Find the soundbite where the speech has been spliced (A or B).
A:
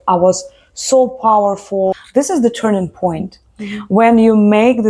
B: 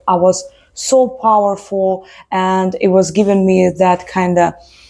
A